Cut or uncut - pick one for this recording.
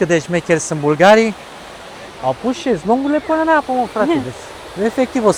uncut